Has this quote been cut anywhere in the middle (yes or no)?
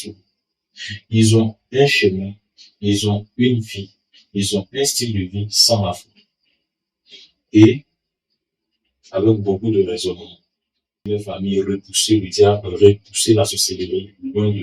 yes